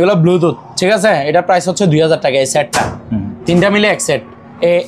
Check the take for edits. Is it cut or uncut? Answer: uncut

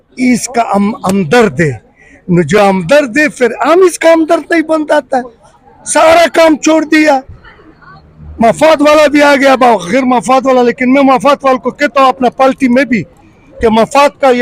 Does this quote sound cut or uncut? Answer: uncut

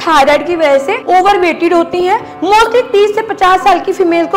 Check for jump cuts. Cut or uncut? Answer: uncut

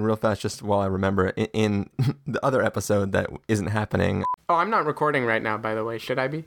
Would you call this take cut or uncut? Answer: cut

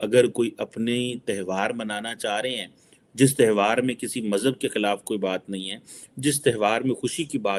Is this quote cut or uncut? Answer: uncut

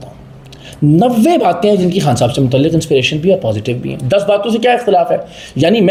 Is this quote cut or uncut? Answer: uncut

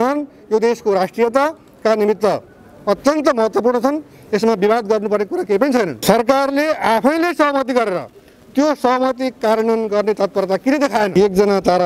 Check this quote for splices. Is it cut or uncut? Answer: cut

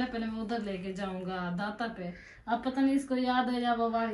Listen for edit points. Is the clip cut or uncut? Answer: uncut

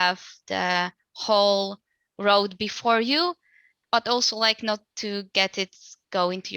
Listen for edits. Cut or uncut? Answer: cut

